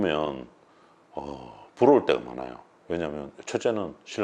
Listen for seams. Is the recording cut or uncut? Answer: uncut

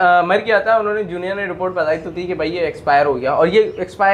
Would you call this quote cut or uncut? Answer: uncut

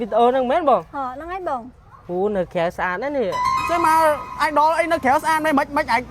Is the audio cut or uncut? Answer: cut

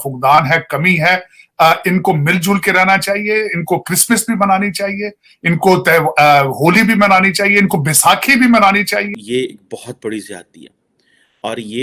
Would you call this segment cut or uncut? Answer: cut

